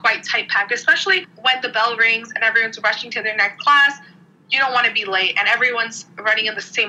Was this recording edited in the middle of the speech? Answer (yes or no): no